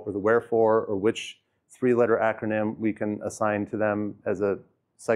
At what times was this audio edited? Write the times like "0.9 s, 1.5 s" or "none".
none